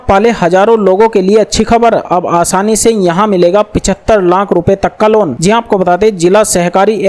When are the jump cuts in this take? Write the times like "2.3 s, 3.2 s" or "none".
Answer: none